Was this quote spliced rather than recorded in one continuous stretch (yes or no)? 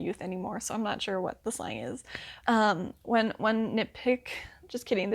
yes